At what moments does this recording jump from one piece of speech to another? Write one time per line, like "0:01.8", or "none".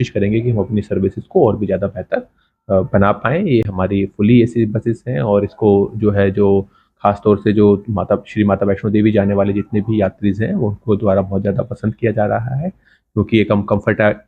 none